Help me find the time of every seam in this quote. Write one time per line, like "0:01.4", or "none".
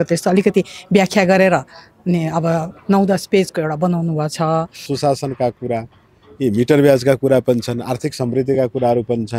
0:04.9